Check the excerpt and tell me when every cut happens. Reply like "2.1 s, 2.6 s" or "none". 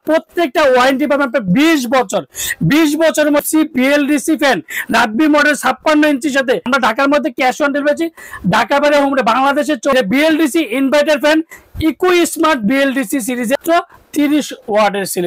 3.4 s, 6.7 s, 9.9 s, 13.6 s